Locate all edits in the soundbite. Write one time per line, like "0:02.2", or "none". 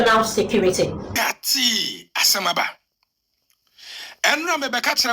0:01.1